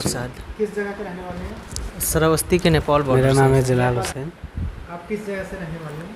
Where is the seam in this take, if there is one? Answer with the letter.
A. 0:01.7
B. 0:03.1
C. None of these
B